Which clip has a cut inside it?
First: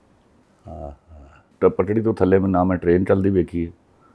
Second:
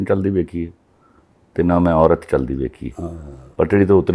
first; 1 cut; at 1.5 s

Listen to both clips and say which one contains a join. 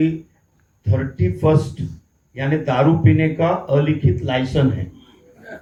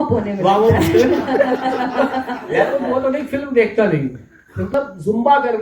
second; 1 cut; at 4.7 s

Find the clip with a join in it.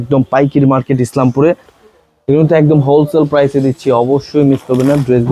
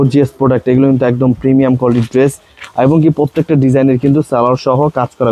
first; 1 cut; at 1.8 s

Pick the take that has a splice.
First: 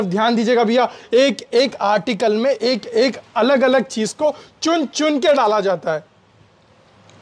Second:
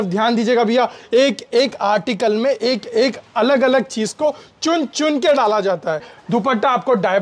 second; 1 cut; at 6.1 s

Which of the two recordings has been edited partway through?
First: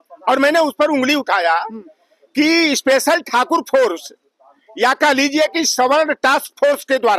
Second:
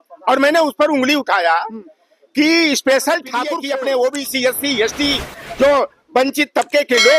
second; 1 cut; at 3.6 s

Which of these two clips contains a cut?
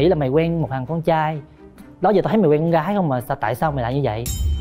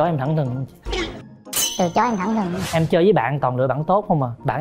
second; 1 cut; at 2.6 s

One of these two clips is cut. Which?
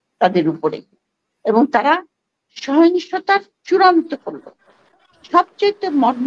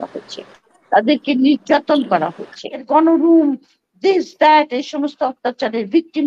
second; 1 cut; at 2.8 s

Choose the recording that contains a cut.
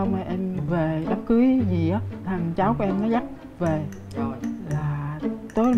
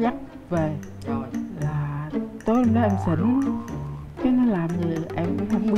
first; 1 cut; at 2.1 s

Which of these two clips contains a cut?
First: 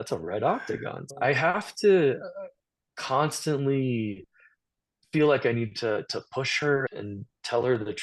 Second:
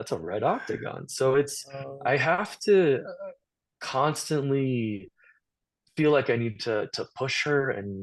first; 2 cuts; at 1.0 s, 6.9 s

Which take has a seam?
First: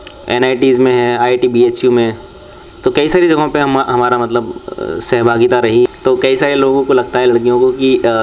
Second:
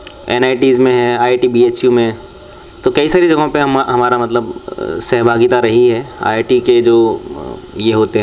first; 1 cut; at 5.9 s

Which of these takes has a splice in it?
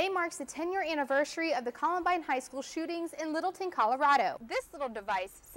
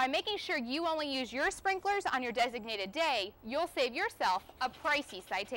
first; 1 cut; at 4.4 s

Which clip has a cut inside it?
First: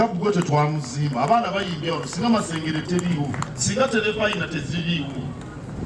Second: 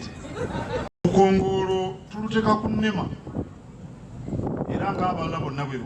second; 1 cut; at 0.9 s

